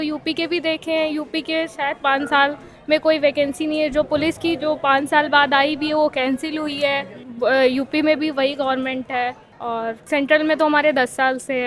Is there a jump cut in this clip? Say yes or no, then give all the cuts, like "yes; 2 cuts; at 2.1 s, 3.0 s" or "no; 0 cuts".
no; 0 cuts